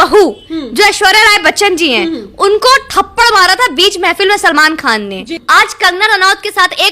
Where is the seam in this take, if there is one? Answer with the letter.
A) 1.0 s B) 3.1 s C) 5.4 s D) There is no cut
C